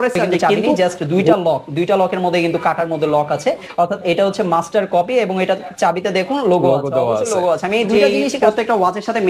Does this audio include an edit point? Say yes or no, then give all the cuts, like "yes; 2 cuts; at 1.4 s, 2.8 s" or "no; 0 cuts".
yes; 2 cuts; at 0.8 s, 8.2 s